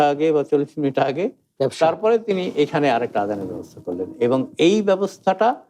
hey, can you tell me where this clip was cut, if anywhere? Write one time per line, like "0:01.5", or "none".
0:01.4